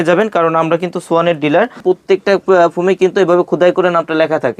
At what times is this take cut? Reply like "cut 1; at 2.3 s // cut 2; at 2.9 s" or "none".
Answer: cut 1; at 1.8 s

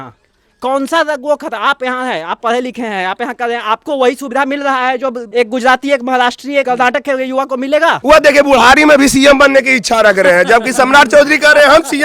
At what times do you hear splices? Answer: cut 1; at 5.2 s // cut 2; at 6.6 s // cut 3; at 8.0 s

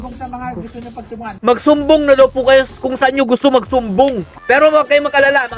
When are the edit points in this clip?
cut 1; at 1.4 s // cut 2; at 4.3 s

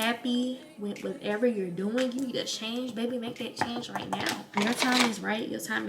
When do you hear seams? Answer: cut 1; at 4.6 s

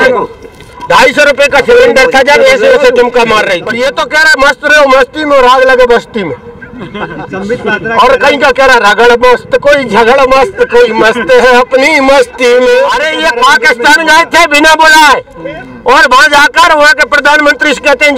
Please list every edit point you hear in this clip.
cut 1; at 3.7 s // cut 2; at 13.0 s

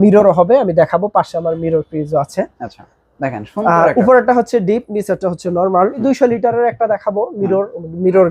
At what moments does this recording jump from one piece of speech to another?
cut 1; at 6.0 s

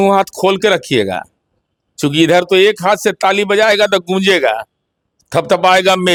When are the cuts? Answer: none

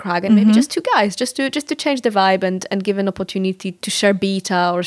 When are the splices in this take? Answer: cut 1; at 3.7 s

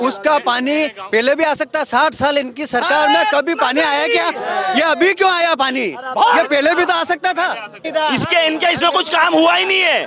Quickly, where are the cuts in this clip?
cut 1; at 7.8 s

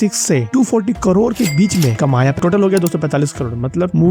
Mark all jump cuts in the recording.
cut 1; at 2.4 s

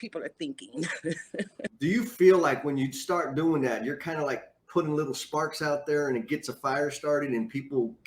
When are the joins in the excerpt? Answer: cut 1; at 1.7 s

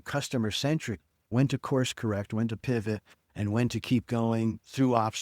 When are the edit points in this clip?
cut 1; at 1.3 s

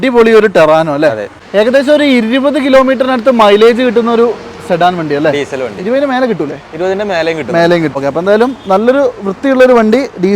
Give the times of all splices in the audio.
cut 1; at 1.4 s // cut 2; at 7.9 s

